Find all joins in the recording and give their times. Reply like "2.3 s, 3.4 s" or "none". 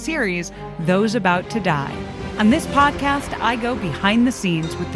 2.2 s